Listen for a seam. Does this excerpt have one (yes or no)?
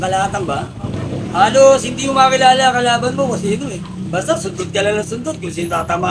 no